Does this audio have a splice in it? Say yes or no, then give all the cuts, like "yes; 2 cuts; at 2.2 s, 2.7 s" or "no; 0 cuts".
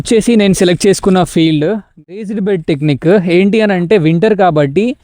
yes; 1 cut; at 2.1 s